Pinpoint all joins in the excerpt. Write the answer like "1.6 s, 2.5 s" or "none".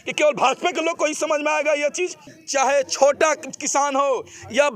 2.3 s